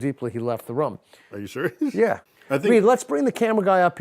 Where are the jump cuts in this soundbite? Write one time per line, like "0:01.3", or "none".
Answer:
0:02.3